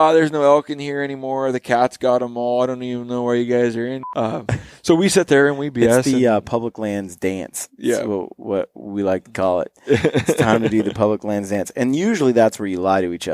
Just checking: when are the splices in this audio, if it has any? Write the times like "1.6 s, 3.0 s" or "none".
4.0 s